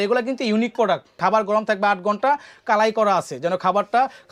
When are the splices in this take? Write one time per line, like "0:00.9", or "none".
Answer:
0:01.2